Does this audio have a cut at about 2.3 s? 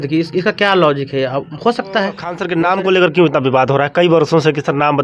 yes; 1 cut; at 2.3 s

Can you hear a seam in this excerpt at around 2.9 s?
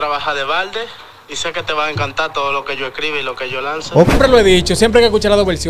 no; 1 cut; at 4.1 s

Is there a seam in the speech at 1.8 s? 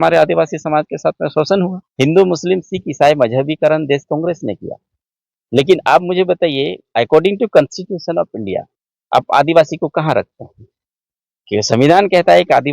yes; 1 cut; at 1.8 s

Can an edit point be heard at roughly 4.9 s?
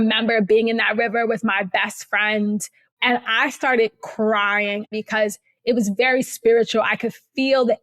yes; 2 cuts; at 2.8 s, 4.9 s

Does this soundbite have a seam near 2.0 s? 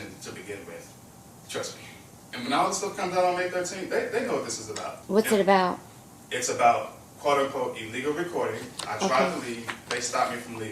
no; 1 cut; at 4.9 s

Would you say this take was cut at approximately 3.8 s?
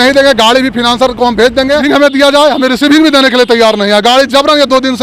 no; 1 cut; at 1.8 s

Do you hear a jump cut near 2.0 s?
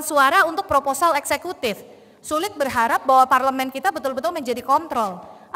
no; 0 cuts

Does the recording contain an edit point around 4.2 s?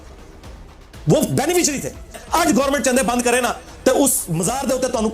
no; 1 cut; at 2.2 s

